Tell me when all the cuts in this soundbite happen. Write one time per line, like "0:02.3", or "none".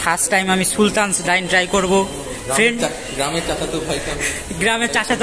none